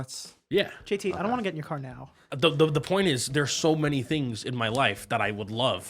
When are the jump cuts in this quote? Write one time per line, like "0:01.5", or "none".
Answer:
0:02.2

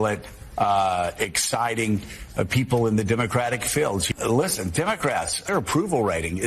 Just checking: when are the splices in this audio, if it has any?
0:04.1
0:05.4

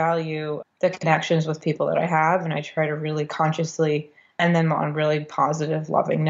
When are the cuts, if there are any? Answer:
none

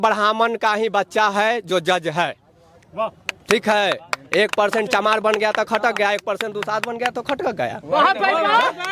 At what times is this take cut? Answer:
none

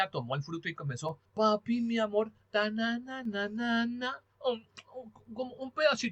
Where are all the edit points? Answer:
0:01.2

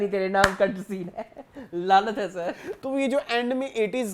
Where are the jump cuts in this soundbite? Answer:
0:02.7

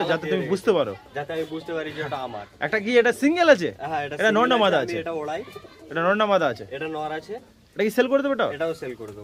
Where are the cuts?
none

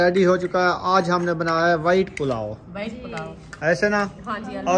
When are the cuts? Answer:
none

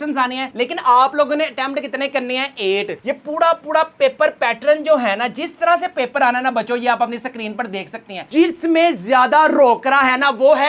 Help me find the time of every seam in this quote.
0:08.3

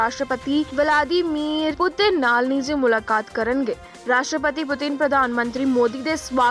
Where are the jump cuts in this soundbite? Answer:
0:01.7

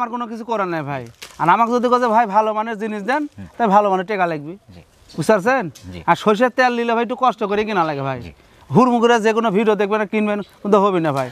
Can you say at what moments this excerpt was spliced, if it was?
none

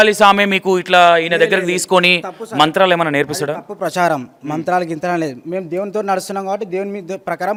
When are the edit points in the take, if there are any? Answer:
none

